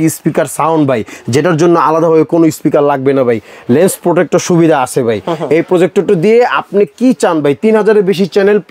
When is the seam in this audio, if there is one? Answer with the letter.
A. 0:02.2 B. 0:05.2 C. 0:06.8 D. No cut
D